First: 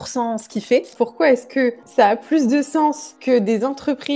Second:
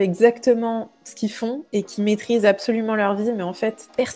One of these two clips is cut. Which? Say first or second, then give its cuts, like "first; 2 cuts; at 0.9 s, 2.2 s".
first; 1 cut; at 0.9 s